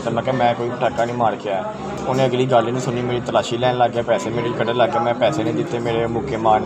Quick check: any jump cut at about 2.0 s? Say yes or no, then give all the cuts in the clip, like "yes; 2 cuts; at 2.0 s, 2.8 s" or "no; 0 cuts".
yes; 1 cut; at 2.0 s